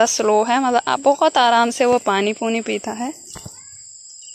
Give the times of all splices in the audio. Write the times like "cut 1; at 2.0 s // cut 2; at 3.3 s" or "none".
none